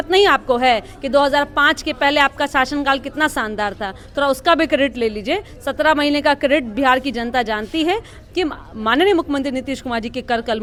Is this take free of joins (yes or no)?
yes